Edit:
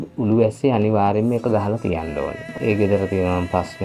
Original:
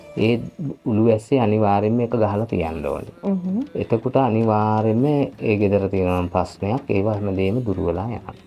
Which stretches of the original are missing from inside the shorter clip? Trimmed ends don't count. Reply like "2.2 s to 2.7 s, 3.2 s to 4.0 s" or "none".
3.2 s to 5.3 s